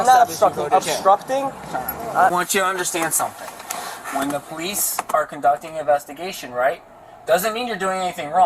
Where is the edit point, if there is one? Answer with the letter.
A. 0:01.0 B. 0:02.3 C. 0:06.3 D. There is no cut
B